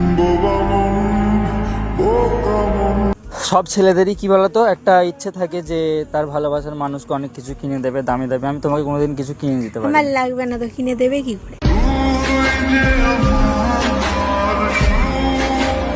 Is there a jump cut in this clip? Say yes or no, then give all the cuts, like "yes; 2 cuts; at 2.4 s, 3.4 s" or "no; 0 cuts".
yes; 1 cut; at 3.1 s